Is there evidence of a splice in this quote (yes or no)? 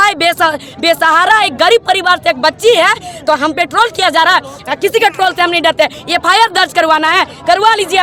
no